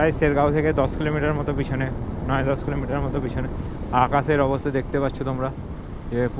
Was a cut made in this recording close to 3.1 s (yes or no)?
no